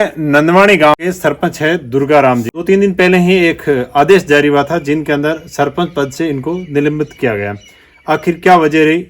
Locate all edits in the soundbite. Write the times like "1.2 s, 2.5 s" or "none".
0.9 s, 2.5 s